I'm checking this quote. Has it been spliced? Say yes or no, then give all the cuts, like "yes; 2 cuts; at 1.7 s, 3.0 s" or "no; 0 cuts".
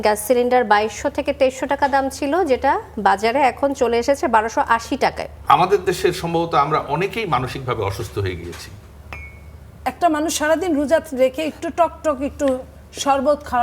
yes; 2 cuts; at 5.3 s, 9.8 s